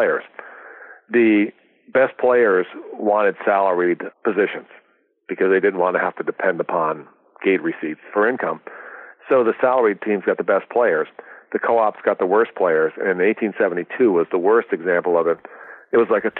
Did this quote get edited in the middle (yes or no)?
yes